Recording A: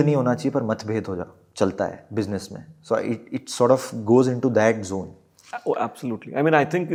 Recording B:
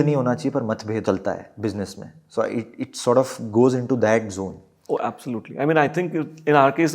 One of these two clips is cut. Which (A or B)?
B